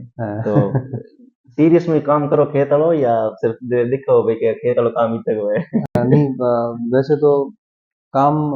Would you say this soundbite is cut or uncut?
uncut